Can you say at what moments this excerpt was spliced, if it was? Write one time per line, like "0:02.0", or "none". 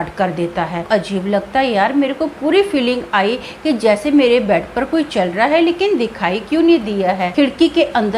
0:00.9
0:07.3